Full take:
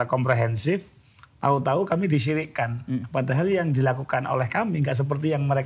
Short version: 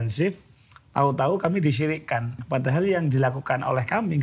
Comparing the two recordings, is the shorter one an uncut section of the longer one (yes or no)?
no